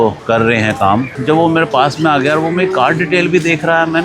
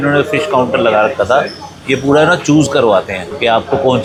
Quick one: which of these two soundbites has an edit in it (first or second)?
first